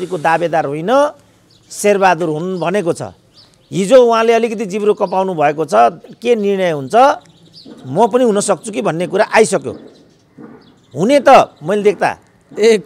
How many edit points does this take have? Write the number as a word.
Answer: zero